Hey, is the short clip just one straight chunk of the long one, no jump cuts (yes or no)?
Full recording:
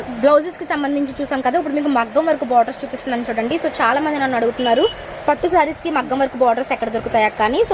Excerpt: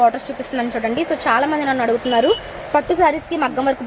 yes